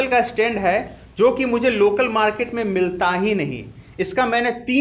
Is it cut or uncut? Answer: uncut